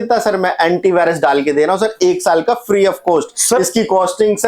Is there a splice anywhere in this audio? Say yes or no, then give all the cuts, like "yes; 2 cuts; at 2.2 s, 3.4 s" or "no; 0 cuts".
no; 0 cuts